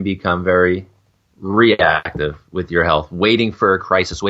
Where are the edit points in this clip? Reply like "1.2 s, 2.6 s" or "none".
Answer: none